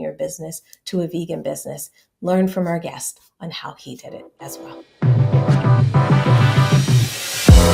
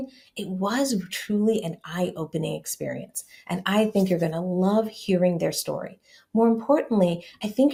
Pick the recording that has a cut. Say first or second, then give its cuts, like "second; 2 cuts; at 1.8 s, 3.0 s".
first; 1 cut; at 4.4 s